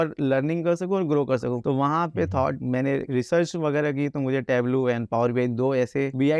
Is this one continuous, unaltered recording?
yes; 0 cuts

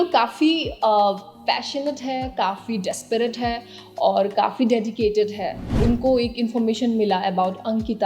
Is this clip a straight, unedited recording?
no; 1 cut; at 5.7 s

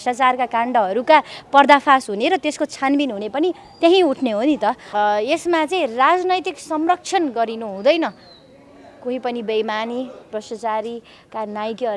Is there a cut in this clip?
yes; 1 cut; at 4.8 s

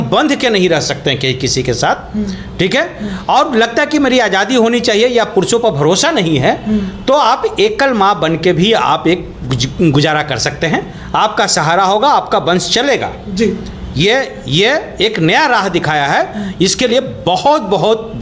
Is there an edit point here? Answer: no; 0 cuts

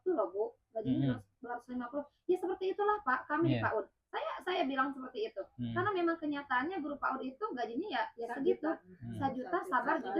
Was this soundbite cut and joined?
no; 0 cuts

